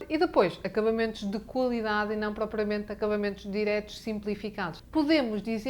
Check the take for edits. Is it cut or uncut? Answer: cut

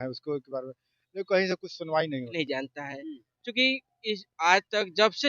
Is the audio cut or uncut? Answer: cut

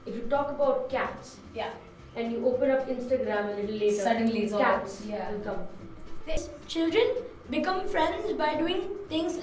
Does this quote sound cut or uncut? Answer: cut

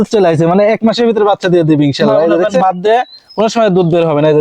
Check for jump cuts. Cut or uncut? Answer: cut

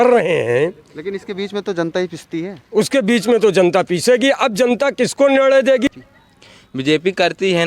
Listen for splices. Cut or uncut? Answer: cut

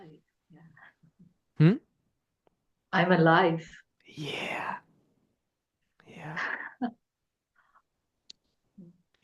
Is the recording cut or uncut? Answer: uncut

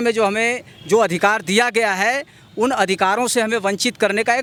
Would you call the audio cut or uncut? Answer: uncut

